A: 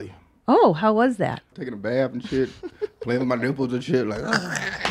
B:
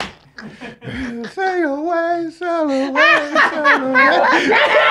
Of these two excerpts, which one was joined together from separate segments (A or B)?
A